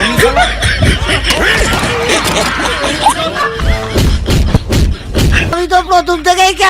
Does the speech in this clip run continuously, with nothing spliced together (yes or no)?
no